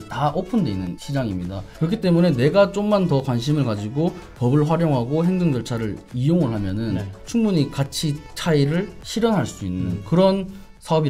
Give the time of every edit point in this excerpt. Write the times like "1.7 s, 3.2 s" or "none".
1.3 s, 7.1 s, 9.0 s, 10.0 s